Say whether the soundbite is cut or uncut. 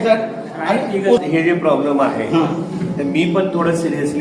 cut